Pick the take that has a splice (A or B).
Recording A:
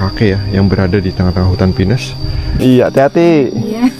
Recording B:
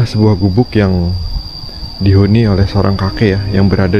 A